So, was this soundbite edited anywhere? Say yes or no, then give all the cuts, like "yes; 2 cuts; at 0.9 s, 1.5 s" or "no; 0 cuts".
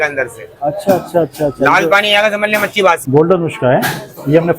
yes; 1 cut; at 3.0 s